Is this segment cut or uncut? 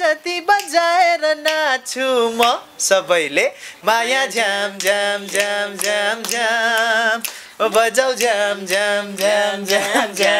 uncut